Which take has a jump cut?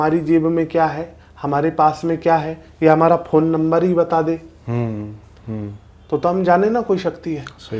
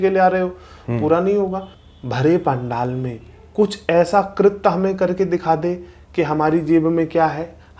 second; 1 cut; at 1.7 s

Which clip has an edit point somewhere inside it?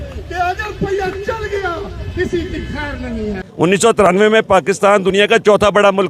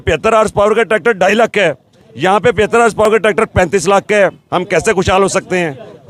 first; 1 cut; at 3.4 s

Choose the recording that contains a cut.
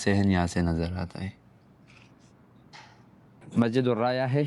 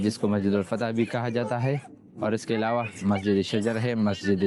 first; 1 cut; at 3.5 s

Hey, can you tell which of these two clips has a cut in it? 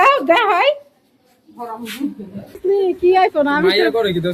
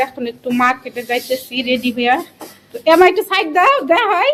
first; 1 cut; at 2.5 s

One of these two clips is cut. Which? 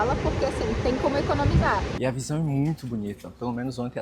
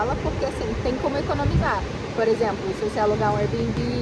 first; 1 cut; at 1.9 s

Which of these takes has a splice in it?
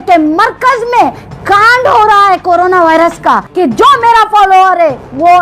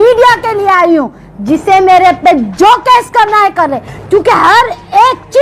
first; 1 cut; at 3.5 s

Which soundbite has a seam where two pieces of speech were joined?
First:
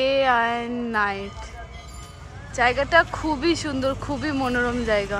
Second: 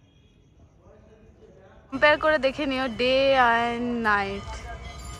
second; 1 cut; at 1.9 s

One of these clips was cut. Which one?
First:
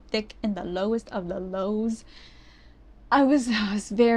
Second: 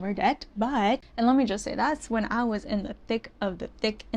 second; 1 cut; at 1.0 s

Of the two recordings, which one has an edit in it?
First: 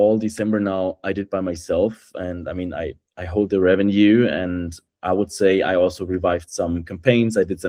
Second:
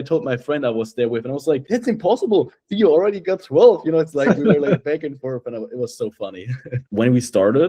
second; 1 cut; at 6.8 s

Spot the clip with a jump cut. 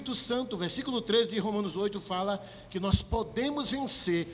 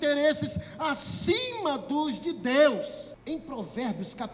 second; 1 cut; at 3.1 s

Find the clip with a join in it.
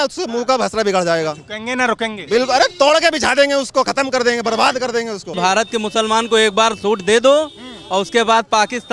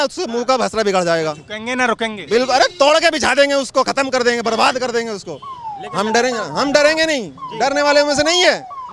first; 1 cut; at 5.4 s

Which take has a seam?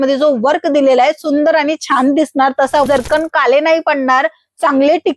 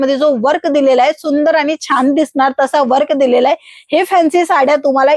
first; 1 cut; at 2.9 s

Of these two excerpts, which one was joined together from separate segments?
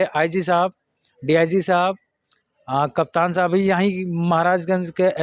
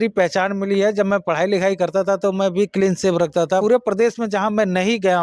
second; 1 cut; at 3.6 s

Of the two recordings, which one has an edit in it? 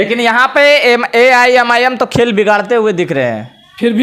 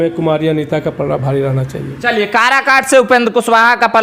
second; 1 cut; at 1.9 s

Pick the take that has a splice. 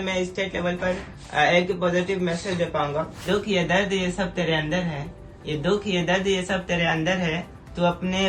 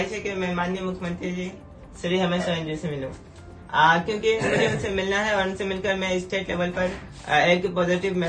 first; 1 cut; at 3.2 s

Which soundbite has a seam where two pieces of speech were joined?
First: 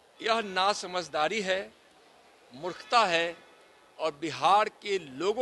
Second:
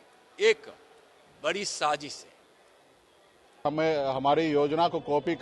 second; 1 cut; at 3.6 s

